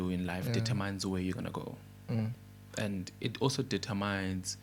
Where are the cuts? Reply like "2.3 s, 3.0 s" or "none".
none